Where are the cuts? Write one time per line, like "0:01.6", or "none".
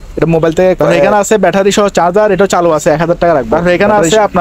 0:00.9
0:03.5